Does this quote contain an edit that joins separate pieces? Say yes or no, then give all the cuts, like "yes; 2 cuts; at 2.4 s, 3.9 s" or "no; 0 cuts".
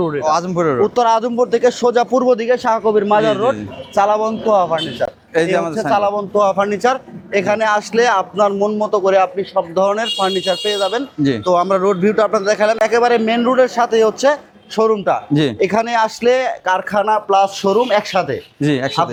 no; 0 cuts